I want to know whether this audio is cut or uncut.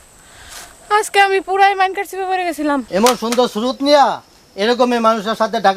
cut